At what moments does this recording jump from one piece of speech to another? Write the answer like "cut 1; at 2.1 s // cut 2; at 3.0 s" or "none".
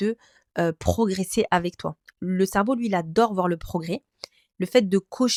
none